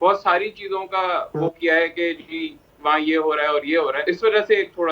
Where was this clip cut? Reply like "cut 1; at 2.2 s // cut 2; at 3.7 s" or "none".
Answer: cut 1; at 4.0 s